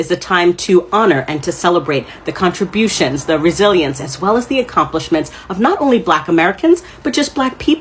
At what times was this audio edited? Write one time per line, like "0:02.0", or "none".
none